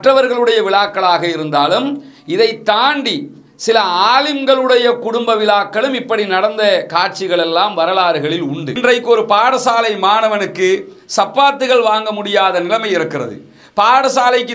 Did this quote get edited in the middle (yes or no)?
yes